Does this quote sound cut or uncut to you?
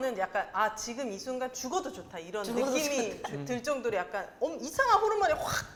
uncut